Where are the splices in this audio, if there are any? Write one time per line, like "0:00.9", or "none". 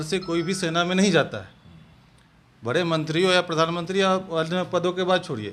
none